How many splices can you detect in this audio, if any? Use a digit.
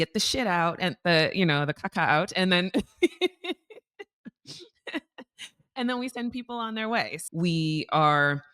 2